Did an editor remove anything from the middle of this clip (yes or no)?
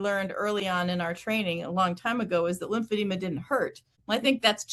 no